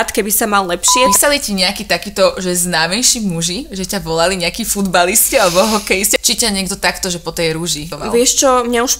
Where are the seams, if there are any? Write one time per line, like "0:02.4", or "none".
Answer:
0:01.1
0:06.2
0:07.9